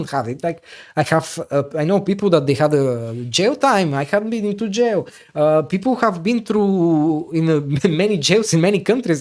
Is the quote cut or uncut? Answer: uncut